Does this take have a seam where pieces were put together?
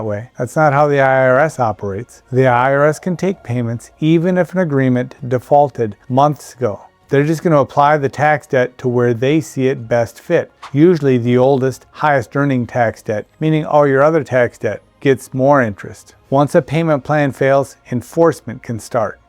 no; 0 cuts

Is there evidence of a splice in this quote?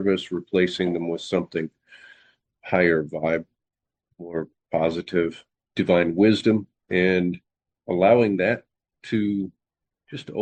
no; 0 cuts

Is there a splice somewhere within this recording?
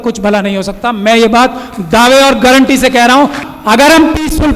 yes; 1 cut; at 3.4 s

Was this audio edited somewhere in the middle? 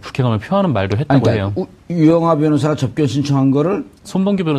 no; 0 cuts

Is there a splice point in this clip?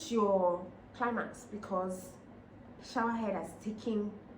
yes; 1 cut; at 2.8 s

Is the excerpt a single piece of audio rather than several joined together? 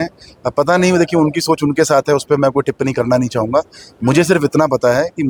yes; 0 cuts

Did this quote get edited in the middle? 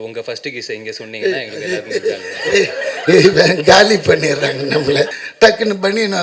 yes; 1 cut; at 5.2 s

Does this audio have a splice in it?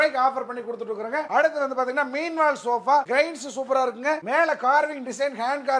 no; 0 cuts

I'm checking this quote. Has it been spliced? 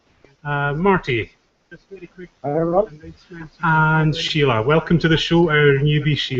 yes; 1 cut; at 5.1 s

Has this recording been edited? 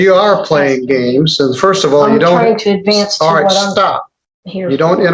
no; 0 cuts

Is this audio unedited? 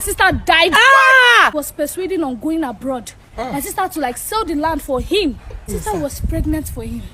no; 2 cuts; at 1.5 s, 5.7 s

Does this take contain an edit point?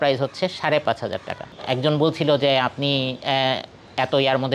yes; 1 cut; at 1.6 s

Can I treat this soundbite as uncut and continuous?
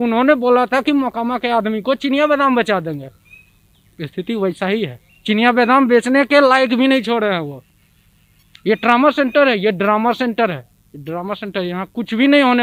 yes; 0 cuts

